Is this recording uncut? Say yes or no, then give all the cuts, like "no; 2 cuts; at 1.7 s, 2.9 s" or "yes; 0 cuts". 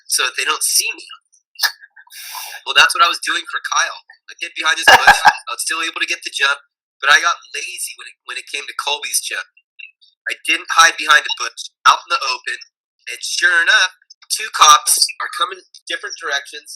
no; 2 cuts; at 14.1 s, 15.7 s